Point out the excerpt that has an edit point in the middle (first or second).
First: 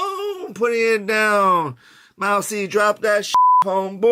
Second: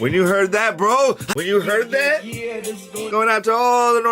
second